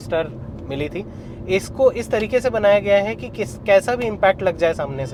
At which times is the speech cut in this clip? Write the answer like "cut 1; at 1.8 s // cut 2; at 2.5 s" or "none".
none